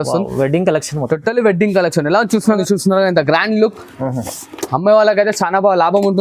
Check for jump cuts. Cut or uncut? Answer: cut